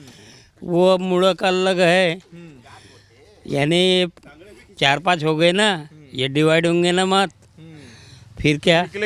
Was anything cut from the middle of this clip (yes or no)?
no